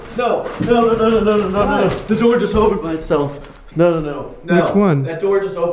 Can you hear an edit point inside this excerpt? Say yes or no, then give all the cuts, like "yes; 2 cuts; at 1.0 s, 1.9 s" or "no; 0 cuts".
no; 0 cuts